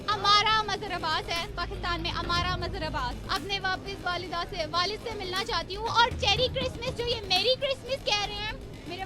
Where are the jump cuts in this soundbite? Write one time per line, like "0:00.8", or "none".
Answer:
0:03.2